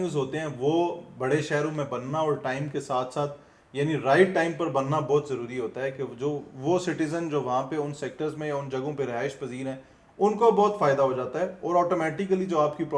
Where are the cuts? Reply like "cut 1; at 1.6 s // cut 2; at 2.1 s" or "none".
none